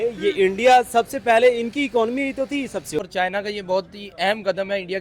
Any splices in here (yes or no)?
yes